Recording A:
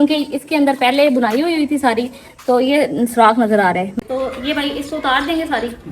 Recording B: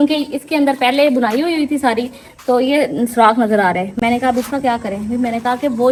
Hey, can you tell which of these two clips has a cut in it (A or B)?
A